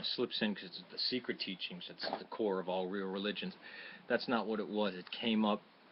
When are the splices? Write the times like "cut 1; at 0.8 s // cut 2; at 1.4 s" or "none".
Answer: cut 1; at 1.7 s